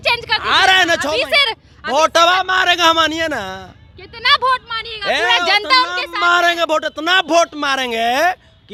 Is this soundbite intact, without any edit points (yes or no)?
yes